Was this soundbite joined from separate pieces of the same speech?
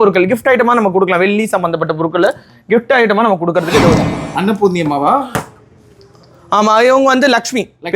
yes; 1 cut; at 4.2 s

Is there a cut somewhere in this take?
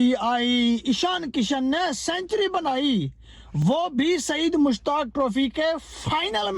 no; 0 cuts

